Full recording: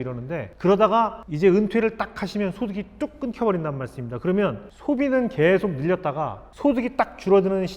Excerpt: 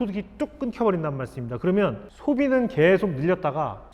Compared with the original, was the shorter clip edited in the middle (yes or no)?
no